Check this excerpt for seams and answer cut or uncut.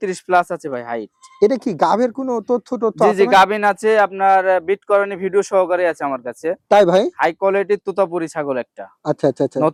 uncut